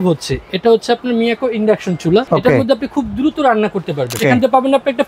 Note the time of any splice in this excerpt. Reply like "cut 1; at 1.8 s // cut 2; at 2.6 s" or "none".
cut 1; at 2.3 s // cut 2; at 4.2 s